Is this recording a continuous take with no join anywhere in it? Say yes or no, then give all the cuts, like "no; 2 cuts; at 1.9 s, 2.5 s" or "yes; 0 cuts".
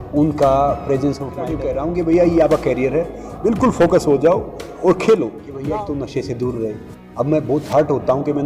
no; 2 cuts; at 1.5 s, 5.5 s